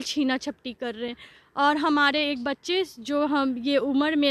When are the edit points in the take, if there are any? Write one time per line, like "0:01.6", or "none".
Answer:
none